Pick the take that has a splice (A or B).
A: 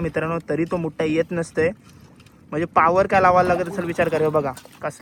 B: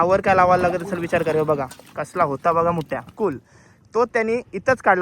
B